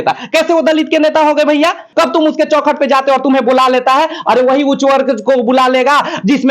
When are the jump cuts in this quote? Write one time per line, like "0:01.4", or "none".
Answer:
0:01.8

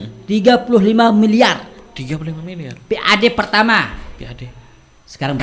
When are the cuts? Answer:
none

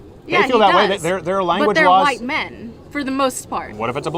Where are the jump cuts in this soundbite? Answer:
none

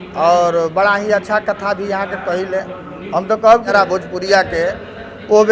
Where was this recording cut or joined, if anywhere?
0:03.7

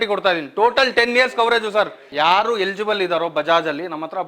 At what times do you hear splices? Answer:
0:02.1

